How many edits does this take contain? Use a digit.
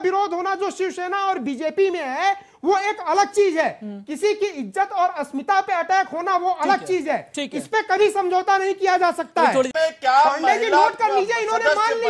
1